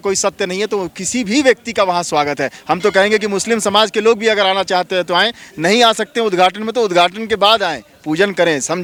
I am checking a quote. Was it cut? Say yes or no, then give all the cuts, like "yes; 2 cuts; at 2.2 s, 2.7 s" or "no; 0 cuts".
no; 0 cuts